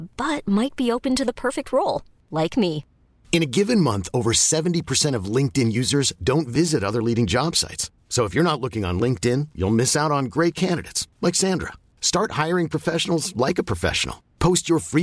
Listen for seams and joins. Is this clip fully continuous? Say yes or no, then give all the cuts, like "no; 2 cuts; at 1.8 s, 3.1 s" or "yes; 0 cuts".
yes; 0 cuts